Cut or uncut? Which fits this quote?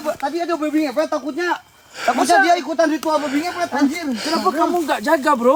uncut